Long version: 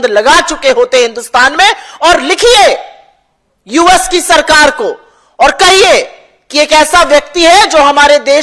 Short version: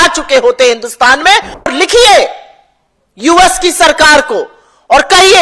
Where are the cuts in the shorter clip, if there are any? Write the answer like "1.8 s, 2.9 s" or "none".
1.7 s